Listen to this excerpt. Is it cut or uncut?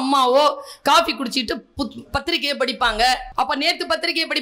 cut